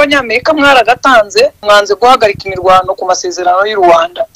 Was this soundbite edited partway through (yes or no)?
yes